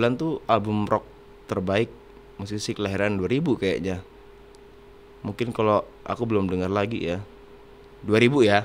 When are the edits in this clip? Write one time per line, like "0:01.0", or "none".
none